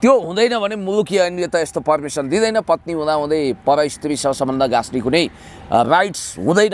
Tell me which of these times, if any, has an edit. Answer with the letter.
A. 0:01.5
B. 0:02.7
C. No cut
C